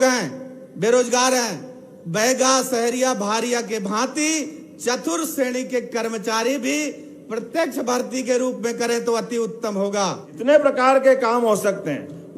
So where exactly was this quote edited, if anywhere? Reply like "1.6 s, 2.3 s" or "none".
10.3 s